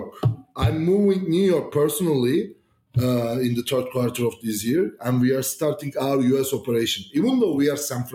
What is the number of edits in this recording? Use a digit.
0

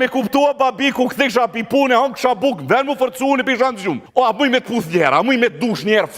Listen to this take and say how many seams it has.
1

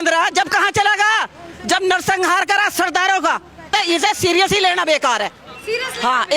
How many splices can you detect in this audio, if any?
1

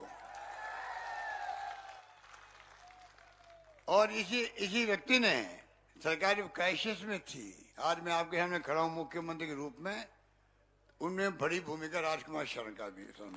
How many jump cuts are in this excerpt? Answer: 1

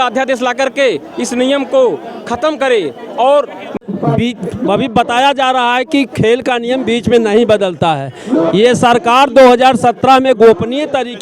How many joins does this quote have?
1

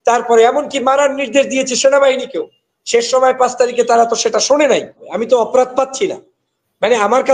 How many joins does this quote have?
1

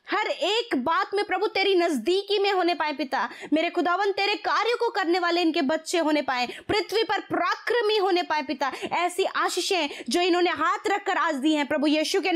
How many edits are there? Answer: 0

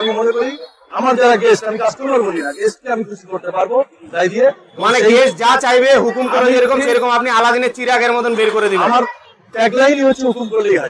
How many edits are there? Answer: 0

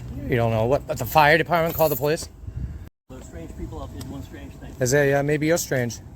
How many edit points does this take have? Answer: 1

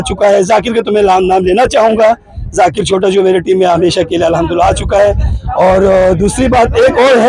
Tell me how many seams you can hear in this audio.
0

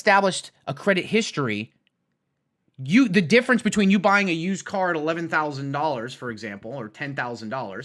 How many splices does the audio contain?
0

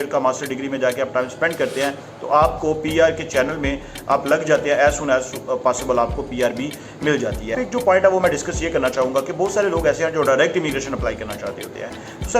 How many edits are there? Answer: 1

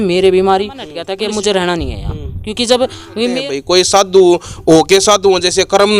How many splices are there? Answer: 2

